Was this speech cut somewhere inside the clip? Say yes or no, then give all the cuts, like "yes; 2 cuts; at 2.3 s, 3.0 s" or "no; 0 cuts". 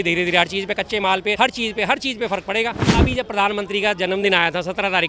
yes; 2 cuts; at 1.4 s, 2.9 s